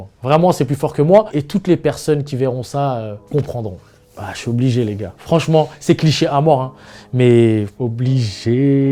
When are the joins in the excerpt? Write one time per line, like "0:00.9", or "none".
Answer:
0:03.2
0:07.7

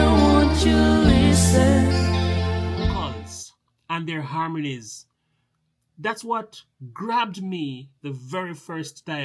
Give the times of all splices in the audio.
0:03.1

